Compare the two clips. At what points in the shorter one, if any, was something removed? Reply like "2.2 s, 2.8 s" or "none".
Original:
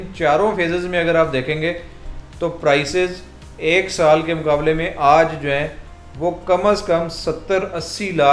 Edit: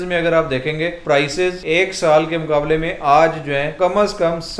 1.0 s, 1.6 s, 3.7 s